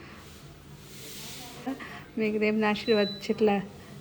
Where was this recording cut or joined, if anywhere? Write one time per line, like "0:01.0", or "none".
0:01.7

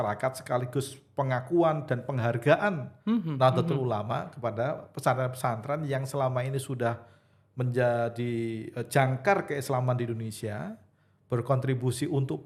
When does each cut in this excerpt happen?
none

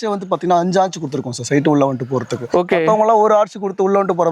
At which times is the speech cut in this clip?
none

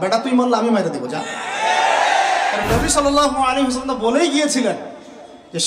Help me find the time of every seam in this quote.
0:02.6

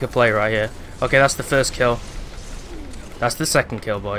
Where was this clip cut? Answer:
none

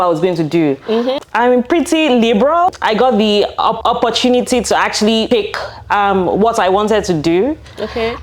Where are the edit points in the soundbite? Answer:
0:01.2
0:02.8
0:03.8
0:05.3

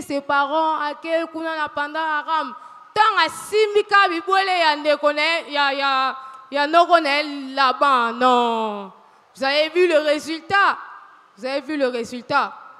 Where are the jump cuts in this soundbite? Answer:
none

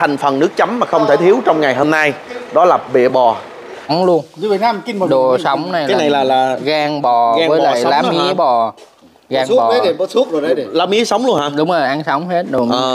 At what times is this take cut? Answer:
0:03.9

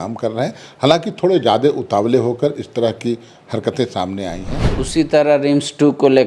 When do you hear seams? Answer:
0:04.6

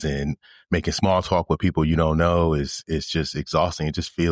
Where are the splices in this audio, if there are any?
none

